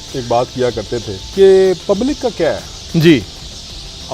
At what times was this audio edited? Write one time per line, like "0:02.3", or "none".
0:01.2